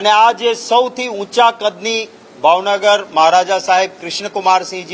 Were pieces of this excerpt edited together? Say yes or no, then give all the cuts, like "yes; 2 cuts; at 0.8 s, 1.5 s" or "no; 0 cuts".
no; 0 cuts